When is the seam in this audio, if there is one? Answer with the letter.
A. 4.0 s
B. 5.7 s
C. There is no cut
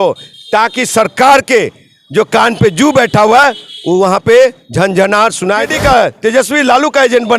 B